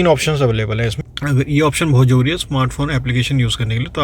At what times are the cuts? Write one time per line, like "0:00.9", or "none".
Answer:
0:01.0